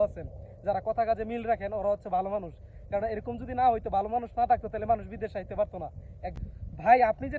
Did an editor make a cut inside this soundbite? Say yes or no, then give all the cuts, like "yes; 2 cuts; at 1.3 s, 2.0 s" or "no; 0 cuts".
yes; 1 cut; at 6.3 s